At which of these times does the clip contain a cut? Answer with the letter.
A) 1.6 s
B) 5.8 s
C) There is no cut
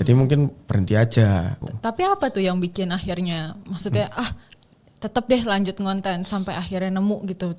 A